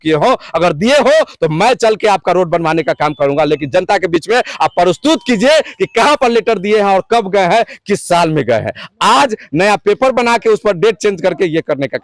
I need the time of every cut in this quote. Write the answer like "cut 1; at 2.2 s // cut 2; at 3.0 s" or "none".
none